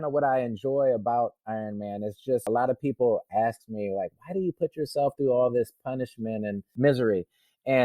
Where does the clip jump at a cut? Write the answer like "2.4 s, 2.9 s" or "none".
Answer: 2.5 s, 6.7 s